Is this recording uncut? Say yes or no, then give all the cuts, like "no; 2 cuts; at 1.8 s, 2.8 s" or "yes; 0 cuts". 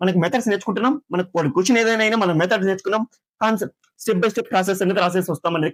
yes; 0 cuts